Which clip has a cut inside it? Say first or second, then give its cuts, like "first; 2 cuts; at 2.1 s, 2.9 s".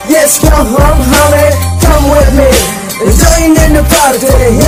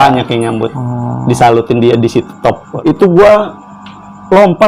second; 1 cut; at 2.8 s